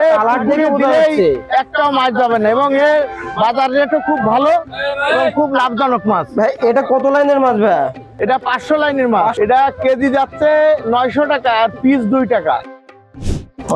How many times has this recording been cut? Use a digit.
2